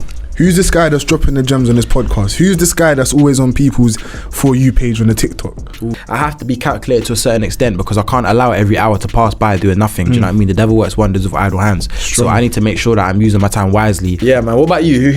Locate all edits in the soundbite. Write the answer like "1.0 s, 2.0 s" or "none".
6.0 s, 14.1 s